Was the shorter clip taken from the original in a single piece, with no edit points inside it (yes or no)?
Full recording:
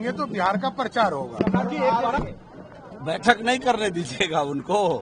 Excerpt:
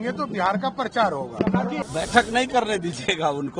no